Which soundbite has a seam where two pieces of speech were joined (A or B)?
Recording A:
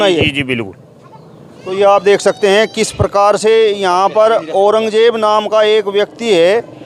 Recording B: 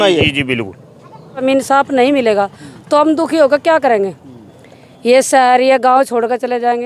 B